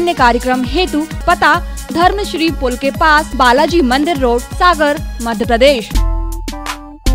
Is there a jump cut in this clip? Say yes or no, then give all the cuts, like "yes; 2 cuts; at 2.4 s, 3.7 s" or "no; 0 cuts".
yes; 4 cuts; at 1.1 s, 3.3 s, 4.5 s, 5.9 s